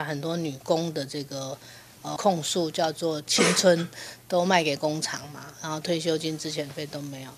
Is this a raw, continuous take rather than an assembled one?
yes; 0 cuts

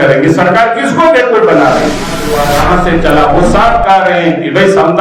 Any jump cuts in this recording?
yes; 1 cut; at 2.3 s

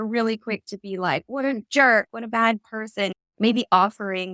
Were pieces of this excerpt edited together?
yes; 1 cut; at 3.2 s

